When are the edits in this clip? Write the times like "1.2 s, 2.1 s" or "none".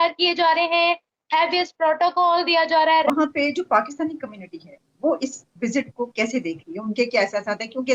3.1 s